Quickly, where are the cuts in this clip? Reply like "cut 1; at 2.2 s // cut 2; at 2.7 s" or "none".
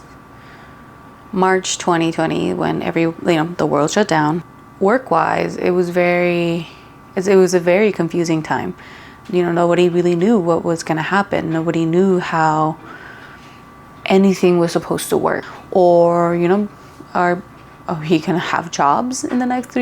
cut 1; at 4.5 s // cut 2; at 15.4 s